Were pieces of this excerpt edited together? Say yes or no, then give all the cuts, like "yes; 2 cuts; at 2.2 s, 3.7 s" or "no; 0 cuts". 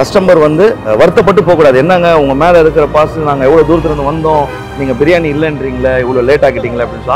yes; 1 cut; at 0.9 s